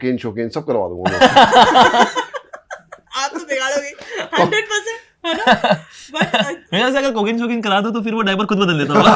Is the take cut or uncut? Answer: uncut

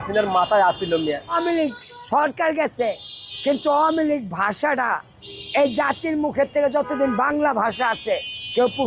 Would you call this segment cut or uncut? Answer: cut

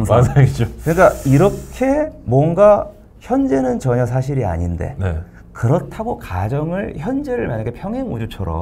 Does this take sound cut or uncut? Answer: uncut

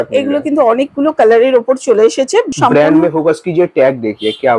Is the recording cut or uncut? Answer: cut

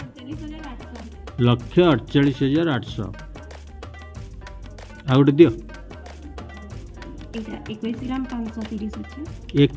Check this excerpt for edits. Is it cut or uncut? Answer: cut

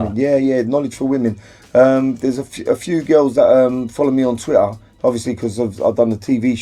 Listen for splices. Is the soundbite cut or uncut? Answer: uncut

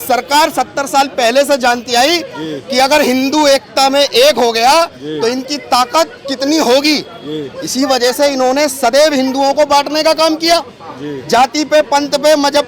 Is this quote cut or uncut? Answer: uncut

